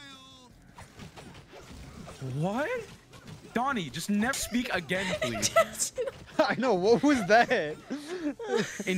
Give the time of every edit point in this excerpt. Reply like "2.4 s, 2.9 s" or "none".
4.4 s